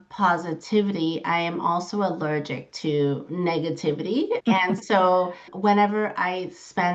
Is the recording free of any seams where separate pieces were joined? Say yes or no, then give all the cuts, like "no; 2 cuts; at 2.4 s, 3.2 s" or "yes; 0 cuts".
no; 2 cuts; at 4.4 s, 5.5 s